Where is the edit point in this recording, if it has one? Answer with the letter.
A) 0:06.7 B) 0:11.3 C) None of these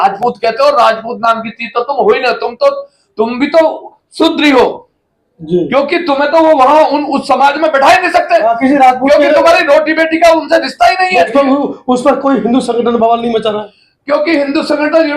B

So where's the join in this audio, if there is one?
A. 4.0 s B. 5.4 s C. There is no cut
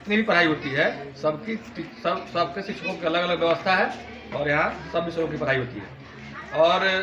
C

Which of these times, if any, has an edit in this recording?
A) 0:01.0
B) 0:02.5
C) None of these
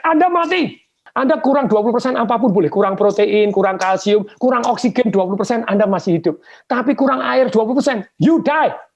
A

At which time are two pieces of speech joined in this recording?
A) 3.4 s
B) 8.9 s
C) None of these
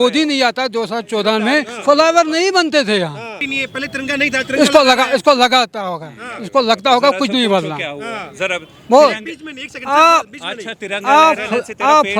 A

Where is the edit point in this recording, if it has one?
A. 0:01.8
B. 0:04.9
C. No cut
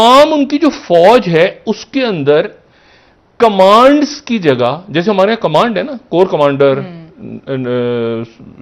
C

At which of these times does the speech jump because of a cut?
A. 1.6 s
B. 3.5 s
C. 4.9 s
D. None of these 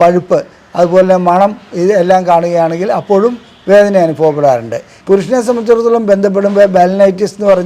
C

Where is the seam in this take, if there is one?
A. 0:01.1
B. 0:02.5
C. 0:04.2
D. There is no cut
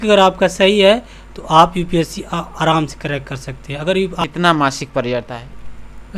C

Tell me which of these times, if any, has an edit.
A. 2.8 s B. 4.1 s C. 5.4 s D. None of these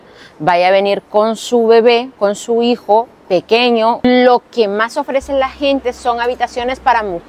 B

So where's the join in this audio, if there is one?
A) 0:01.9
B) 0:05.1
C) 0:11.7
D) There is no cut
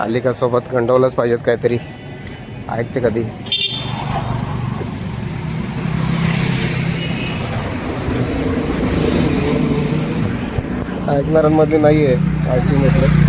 D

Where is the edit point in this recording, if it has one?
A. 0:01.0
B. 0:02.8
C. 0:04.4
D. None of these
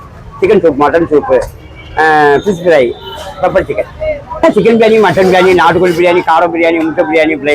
C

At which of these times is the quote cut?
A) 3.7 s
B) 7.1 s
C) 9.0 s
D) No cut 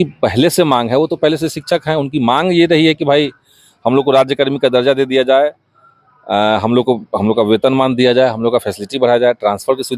D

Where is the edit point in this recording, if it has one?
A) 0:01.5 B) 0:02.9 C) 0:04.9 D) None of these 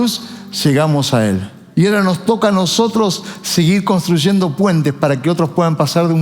A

